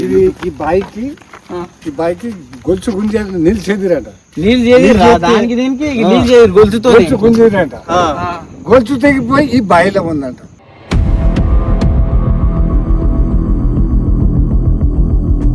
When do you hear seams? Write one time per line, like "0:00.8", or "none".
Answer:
none